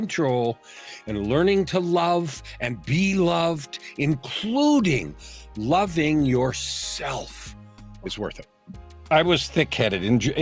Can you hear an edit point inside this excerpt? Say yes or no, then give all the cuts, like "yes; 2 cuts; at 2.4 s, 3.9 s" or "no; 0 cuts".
yes; 1 cut; at 9.1 s